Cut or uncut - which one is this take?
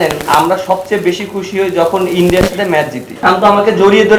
cut